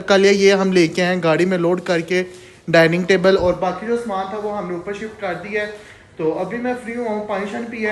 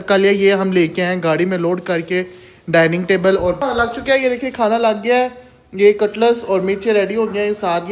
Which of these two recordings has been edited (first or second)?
second